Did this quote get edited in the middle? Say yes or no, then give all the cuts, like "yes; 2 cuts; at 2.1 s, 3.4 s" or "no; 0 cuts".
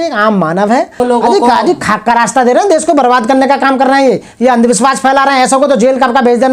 yes; 1 cut; at 1.0 s